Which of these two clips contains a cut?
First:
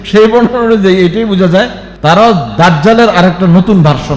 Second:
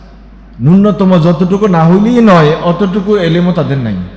first; 1 cut; at 1.8 s

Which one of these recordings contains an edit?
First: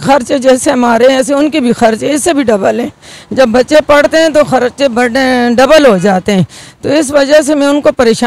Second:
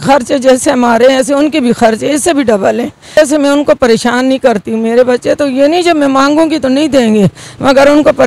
second; 1 cut; at 3.2 s

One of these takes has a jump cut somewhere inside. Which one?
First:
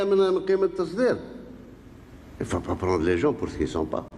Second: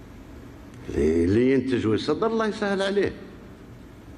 second; 1 cut; at 1.8 s

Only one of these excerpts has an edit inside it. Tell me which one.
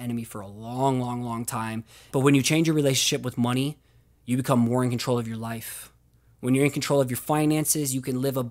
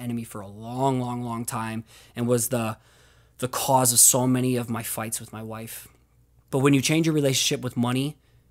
first; 1 cut; at 1.9 s

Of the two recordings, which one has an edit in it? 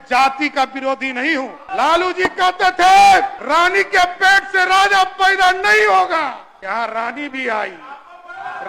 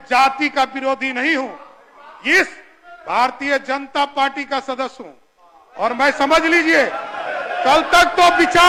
first; 3 cuts; at 1.6 s, 3.4 s, 6.5 s

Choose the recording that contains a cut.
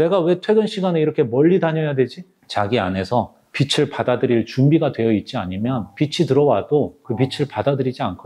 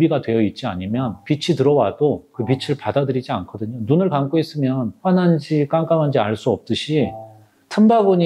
first; 1 cut; at 2.4 s

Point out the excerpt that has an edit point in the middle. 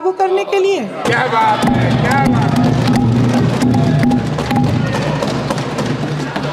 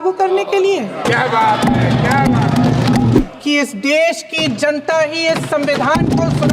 second; 1 cut; at 3.2 s

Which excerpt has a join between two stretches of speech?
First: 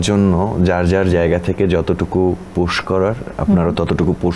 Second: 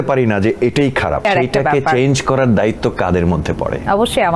second; 1 cut; at 1.2 s

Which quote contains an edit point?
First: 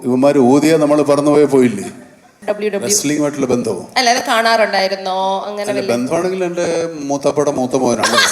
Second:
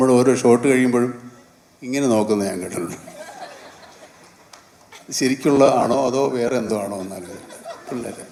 first; 1 cut; at 2.3 s

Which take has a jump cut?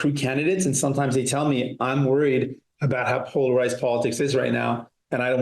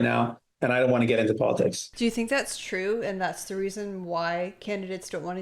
second; 1 cut; at 1.9 s

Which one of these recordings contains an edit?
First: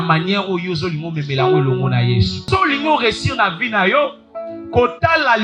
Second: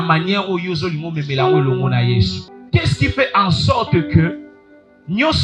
first; 1 cut; at 2.4 s

